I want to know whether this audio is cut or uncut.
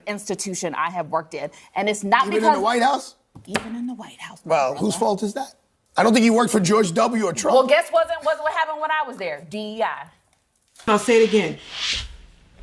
cut